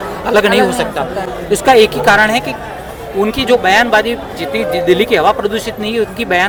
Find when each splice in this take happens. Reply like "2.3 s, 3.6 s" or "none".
none